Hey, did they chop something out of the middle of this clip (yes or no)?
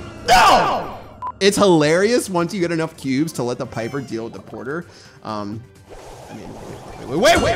yes